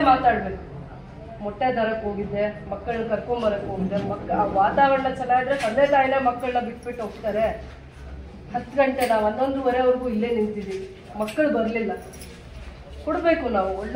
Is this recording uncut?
yes; 0 cuts

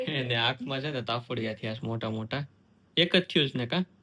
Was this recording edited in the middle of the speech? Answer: no; 0 cuts

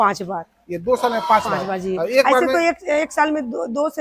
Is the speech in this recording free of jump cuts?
yes; 0 cuts

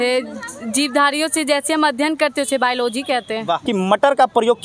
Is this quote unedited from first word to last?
no; 1 cut; at 3.6 s

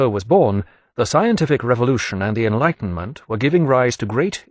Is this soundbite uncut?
yes; 0 cuts

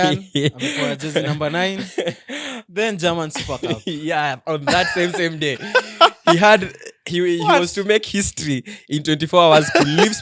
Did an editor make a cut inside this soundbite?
no; 0 cuts

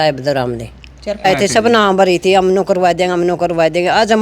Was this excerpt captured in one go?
no; 1 cut; at 1.2 s

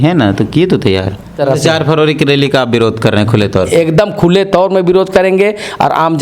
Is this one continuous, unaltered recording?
no; 1 cut; at 1.3 s

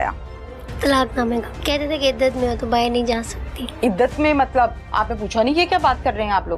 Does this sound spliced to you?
yes; 1 cut; at 1.5 s

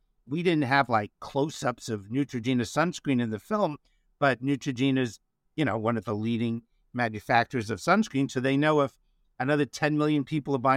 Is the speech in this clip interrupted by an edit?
no; 0 cuts

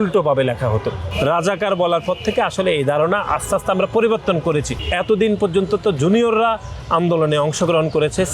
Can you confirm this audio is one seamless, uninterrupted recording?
no; 2 cuts; at 1.0 s, 4.8 s

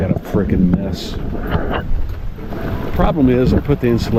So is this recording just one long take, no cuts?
yes; 0 cuts

